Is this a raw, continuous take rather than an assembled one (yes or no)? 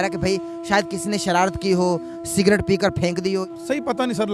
no